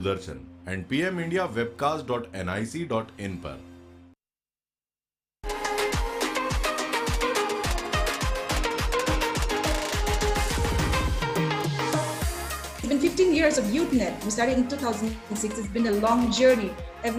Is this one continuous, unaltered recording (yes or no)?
yes